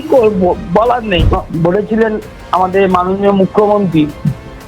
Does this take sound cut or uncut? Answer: cut